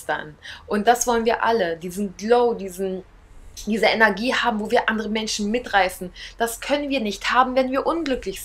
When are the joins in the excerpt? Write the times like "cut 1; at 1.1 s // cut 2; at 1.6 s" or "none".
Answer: none